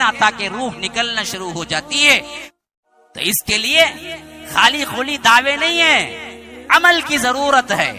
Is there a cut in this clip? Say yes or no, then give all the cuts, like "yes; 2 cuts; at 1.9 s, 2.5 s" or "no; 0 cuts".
yes; 1 cut; at 2.4 s